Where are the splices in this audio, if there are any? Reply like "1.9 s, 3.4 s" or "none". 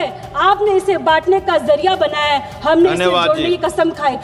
none